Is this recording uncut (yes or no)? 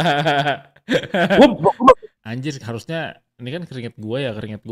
no